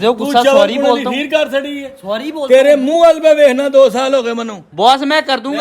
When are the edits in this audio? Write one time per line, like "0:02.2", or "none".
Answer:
0:04.6